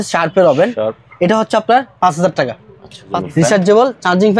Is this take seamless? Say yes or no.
no